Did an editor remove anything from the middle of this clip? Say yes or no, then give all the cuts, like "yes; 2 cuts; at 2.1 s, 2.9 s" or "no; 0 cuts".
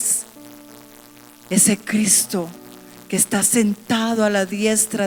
no; 0 cuts